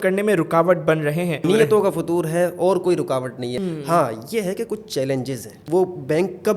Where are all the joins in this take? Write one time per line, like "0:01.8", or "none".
0:01.4
0:03.6
0:05.6

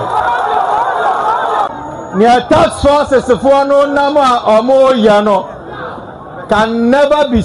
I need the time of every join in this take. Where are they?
none

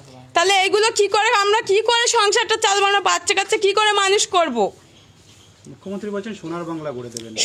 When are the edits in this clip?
none

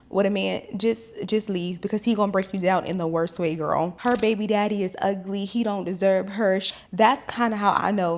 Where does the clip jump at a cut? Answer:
0:03.9
0:06.7

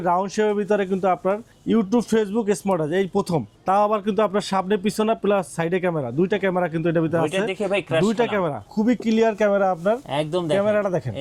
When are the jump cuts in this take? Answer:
0:01.5
0:03.5
0:08.6

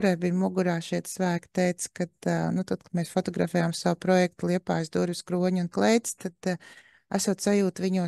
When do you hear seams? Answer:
none

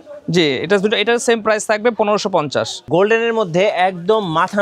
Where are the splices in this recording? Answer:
0:02.9

